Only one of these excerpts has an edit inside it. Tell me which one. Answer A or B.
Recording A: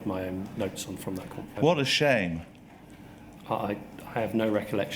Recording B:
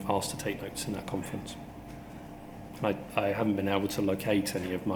A